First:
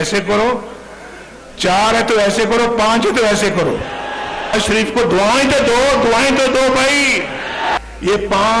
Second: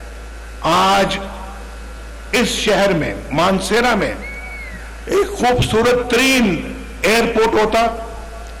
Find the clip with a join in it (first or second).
first